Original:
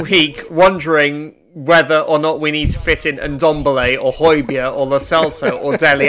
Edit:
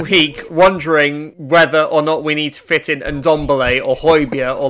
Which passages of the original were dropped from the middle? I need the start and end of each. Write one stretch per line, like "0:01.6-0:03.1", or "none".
0:01.3-0:01.5